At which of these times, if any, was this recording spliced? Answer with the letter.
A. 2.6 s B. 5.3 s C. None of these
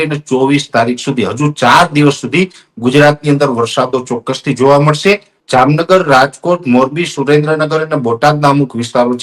B